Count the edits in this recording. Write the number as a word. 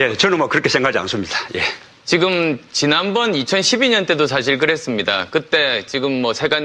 one